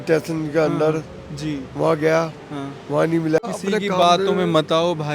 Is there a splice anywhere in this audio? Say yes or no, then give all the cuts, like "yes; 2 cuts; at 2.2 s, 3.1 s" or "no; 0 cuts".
yes; 1 cut; at 3.4 s